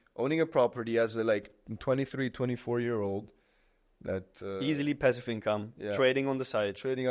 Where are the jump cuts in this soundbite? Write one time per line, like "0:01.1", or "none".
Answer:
none